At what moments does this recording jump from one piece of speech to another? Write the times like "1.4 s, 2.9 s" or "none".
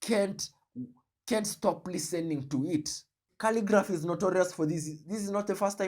3.2 s